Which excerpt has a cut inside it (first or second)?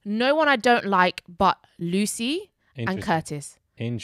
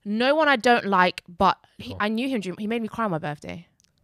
second